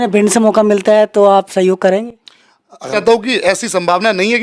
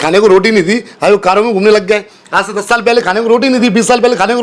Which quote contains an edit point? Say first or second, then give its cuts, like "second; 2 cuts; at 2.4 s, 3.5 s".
first; 1 cut; at 2.8 s